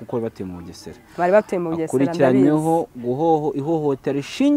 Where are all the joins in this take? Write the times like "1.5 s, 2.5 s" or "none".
none